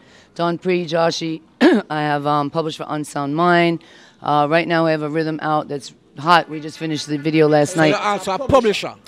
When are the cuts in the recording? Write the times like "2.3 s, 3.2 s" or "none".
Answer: none